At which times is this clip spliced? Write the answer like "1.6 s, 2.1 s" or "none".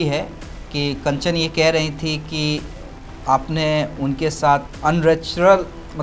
none